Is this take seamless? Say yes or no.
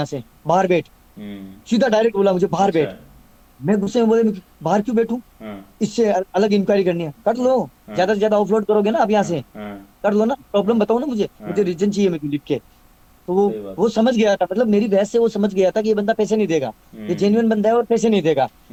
yes